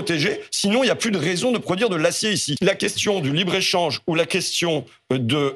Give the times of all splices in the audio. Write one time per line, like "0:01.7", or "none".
0:02.5